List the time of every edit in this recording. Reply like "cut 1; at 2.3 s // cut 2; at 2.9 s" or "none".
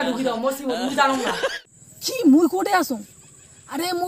cut 1; at 1.6 s